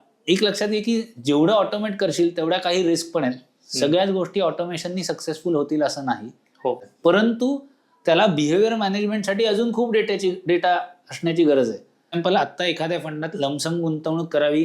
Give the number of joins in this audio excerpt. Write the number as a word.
two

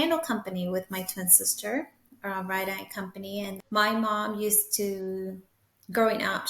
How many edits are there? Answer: one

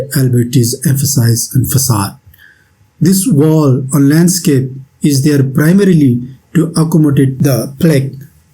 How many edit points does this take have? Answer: one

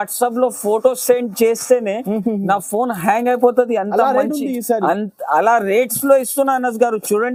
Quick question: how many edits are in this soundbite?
zero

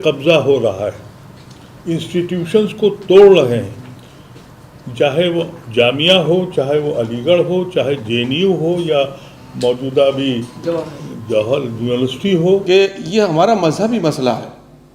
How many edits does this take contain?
one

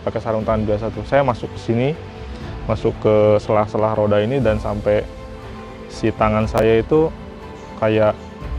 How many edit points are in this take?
zero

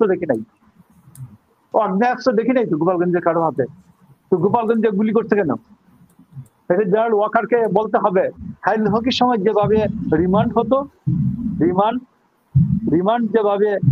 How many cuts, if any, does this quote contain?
one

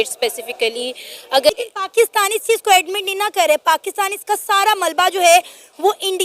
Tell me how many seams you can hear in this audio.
one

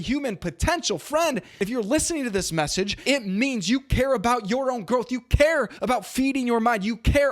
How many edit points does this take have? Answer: three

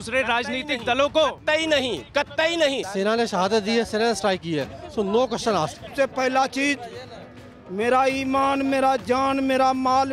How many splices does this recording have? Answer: two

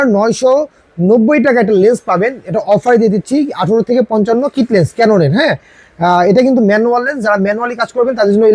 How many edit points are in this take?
zero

